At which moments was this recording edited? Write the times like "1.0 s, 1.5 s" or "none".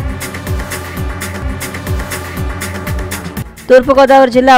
none